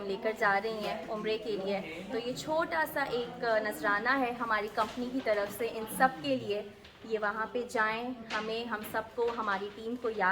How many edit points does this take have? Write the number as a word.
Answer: zero